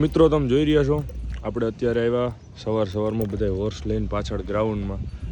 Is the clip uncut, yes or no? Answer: yes